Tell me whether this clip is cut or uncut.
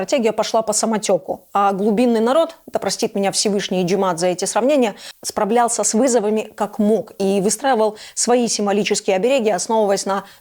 uncut